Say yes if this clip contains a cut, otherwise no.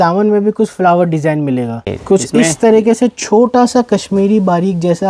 yes